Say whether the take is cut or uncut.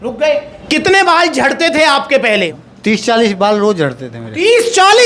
cut